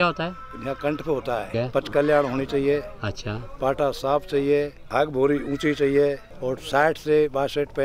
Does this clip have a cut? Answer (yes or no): yes